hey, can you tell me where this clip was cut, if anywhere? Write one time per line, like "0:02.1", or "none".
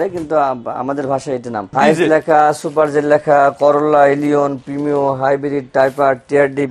0:01.6

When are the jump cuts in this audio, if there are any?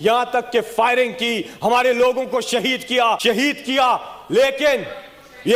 none

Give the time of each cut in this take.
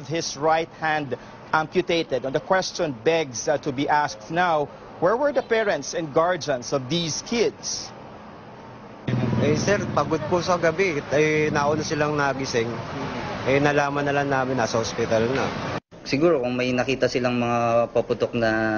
0:11.4

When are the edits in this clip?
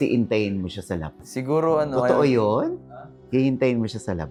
none

